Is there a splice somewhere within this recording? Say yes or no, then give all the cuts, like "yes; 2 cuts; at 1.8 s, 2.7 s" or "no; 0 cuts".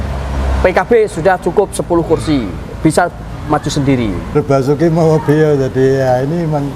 yes; 1 cut; at 4.4 s